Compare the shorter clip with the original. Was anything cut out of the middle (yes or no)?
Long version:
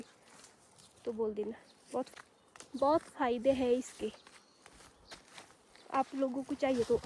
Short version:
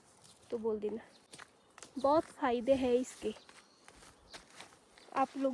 yes